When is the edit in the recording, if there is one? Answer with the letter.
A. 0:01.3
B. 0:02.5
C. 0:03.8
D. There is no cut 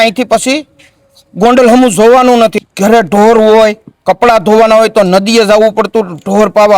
B